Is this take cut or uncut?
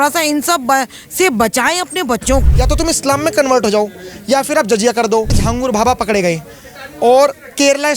cut